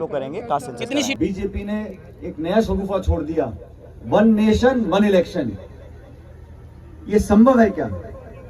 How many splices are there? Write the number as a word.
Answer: one